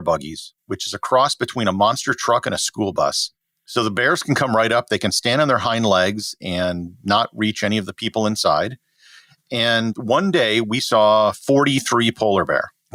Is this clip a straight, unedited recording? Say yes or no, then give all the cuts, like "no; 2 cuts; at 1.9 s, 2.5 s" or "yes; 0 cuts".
yes; 0 cuts